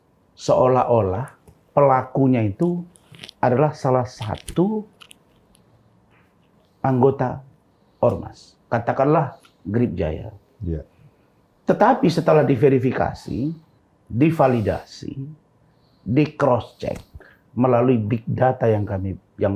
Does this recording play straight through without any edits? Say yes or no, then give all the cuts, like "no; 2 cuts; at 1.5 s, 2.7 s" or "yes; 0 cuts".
yes; 0 cuts